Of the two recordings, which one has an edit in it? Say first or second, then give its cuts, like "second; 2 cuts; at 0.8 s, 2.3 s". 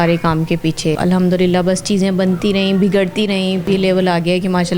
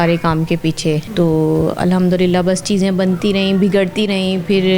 first; 2 cuts; at 1.0 s, 3.6 s